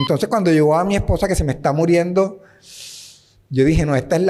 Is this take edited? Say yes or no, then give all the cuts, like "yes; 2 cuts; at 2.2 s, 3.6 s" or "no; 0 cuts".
no; 0 cuts